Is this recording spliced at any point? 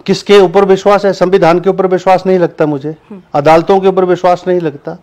no; 0 cuts

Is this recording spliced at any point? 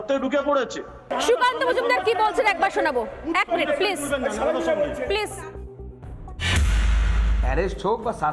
yes; 1 cut; at 1.1 s

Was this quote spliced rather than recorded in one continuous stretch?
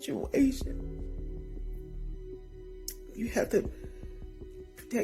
yes; 2 cuts; at 1.3 s, 3.1 s

